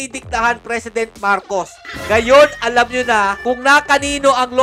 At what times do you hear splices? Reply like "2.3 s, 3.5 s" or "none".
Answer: 1.8 s